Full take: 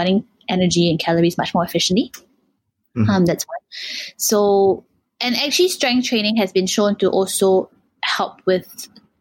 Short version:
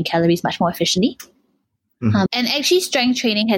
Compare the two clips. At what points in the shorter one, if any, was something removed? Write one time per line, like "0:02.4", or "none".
0:02.3

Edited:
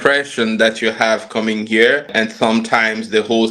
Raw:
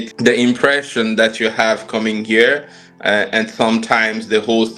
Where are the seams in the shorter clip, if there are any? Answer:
0:02.1

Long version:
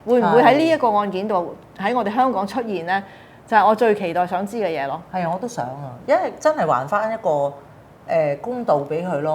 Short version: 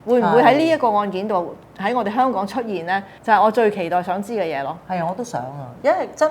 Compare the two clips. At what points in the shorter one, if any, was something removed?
0:03.1

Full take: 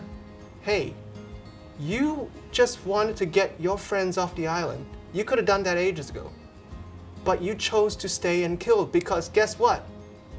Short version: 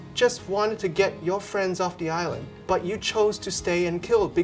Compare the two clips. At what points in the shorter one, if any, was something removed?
0:02.5

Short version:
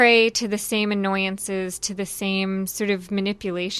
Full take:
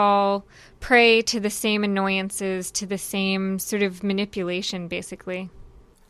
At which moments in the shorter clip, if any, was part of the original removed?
none

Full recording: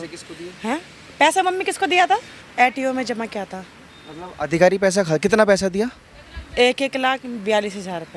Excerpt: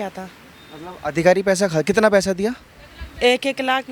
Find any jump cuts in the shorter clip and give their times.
none

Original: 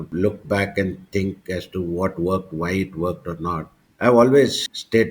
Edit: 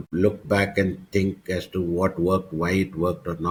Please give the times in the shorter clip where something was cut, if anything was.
none

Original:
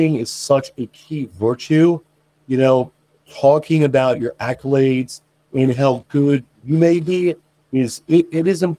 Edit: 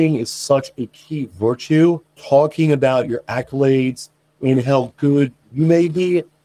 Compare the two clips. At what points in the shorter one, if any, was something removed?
0:02.1

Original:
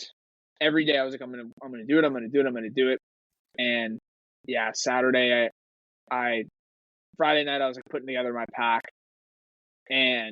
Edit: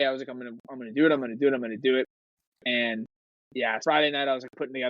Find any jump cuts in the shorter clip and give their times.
0:03.8

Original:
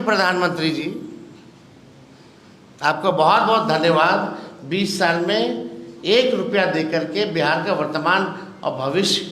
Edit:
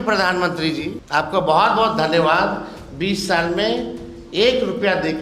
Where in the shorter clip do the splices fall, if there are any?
0:01.0

